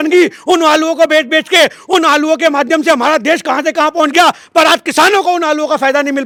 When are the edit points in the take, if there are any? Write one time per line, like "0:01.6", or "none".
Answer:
none

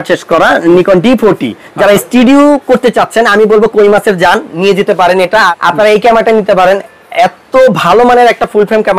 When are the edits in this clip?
0:05.5

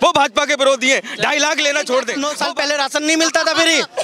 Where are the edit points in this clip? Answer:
0:02.2

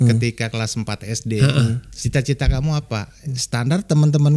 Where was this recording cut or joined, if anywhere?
0:01.9

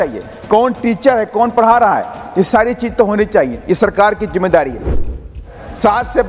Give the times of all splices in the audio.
0:05.2

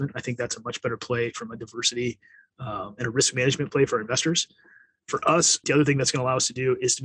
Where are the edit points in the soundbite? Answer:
0:05.6

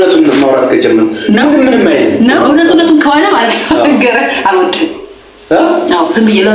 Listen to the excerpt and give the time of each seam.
0:02.4

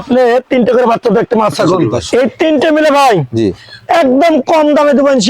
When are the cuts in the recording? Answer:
0:01.9

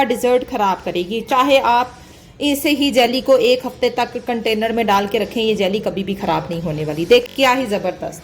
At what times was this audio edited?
0:07.3

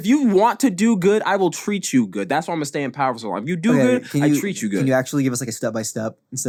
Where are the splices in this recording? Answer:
none

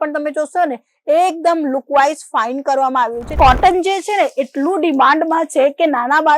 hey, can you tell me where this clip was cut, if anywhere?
0:03.3

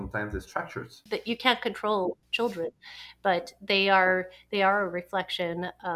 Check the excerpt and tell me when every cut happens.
0:01.0
0:02.2

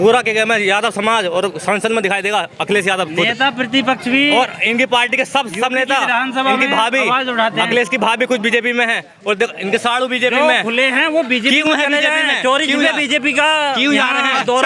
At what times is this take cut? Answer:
none

